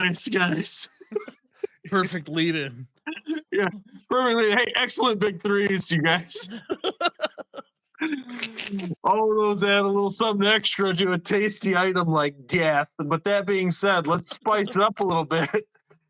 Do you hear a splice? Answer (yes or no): no